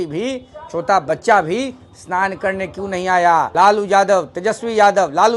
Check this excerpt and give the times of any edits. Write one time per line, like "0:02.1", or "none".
0:03.5